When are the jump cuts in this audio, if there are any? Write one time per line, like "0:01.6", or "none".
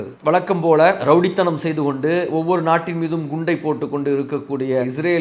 0:01.0